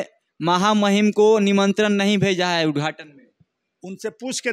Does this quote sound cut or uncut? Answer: uncut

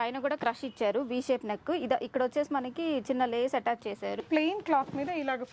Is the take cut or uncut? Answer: cut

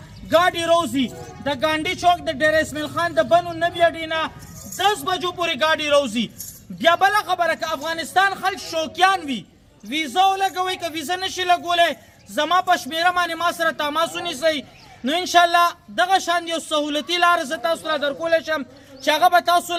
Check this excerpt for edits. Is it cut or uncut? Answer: uncut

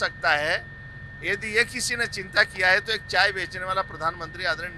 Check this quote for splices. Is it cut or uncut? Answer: uncut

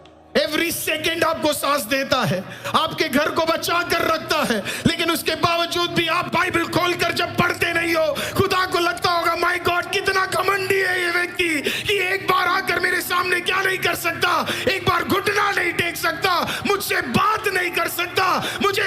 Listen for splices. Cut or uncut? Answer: uncut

